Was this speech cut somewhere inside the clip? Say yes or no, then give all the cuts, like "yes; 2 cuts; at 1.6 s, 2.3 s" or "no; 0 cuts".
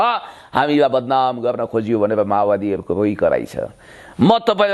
no; 0 cuts